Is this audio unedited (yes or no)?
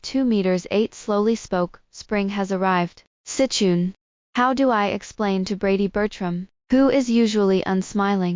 yes